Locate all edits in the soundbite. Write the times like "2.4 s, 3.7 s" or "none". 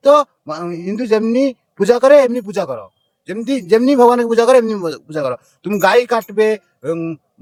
none